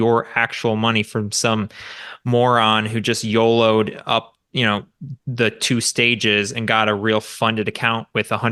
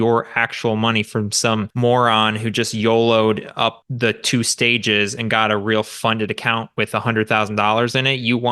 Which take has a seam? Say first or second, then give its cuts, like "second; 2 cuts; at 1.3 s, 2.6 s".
second; 2 cuts; at 1.7 s, 3.9 s